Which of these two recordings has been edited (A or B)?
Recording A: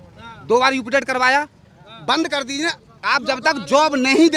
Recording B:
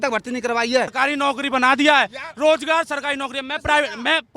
B